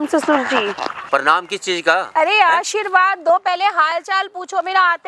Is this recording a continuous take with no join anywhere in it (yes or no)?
no